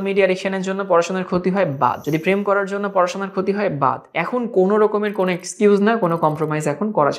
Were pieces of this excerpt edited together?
yes; 2 cuts; at 2.0 s, 4.1 s

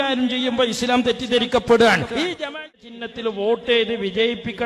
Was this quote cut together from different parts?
yes; 1 cut; at 2.7 s

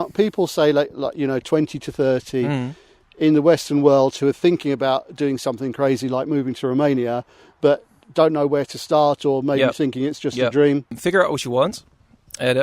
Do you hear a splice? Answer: yes; 1 cut; at 10.9 s

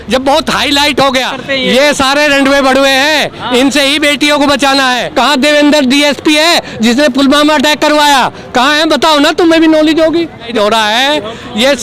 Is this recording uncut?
no; 3 cuts; at 1.4 s, 5.0 s, 10.5 s

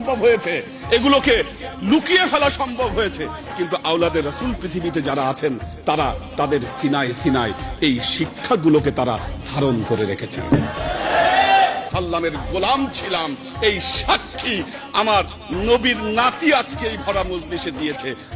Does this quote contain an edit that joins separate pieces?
yes; 1 cut; at 11.9 s

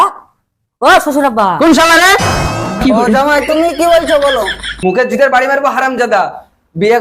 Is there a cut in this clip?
yes; 1 cut; at 4.6 s

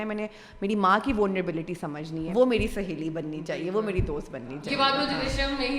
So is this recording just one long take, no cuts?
no; 1 cut; at 2.1 s

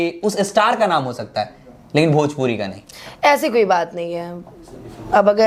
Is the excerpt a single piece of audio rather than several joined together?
yes; 0 cuts

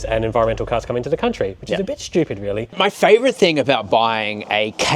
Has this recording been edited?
yes; 1 cut; at 2.8 s

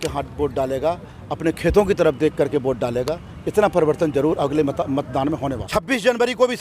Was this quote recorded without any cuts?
no; 1 cut; at 5.6 s

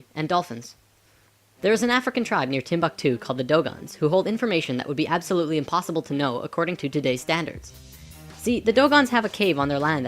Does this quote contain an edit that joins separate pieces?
yes; 1 cut; at 3.9 s

